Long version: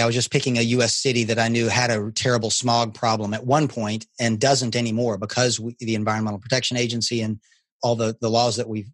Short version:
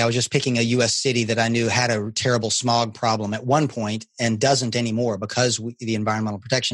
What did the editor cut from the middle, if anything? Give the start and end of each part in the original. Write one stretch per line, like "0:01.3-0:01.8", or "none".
none